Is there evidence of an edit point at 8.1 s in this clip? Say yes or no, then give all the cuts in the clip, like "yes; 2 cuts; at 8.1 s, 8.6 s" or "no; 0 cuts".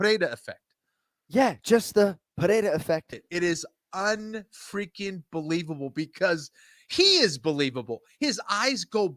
no; 1 cut; at 3.1 s